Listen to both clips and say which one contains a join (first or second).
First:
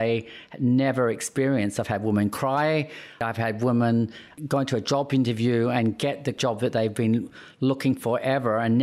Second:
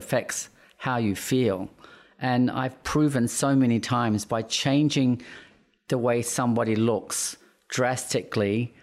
first